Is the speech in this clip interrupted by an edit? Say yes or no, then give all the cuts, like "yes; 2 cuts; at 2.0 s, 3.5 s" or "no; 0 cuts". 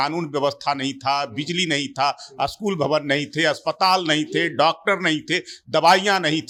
no; 0 cuts